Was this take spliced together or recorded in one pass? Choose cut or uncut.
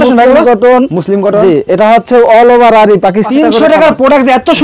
cut